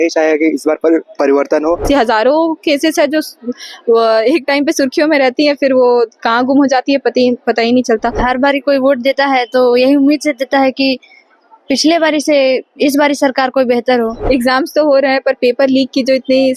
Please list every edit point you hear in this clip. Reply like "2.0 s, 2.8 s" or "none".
1.8 s, 8.2 s, 14.2 s